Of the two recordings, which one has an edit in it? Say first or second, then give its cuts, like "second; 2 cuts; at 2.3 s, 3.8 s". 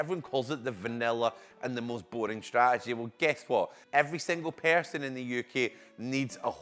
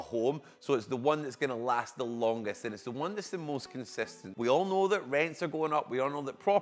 second; 1 cut; at 4.2 s